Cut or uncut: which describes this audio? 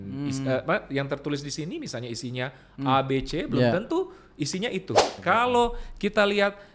cut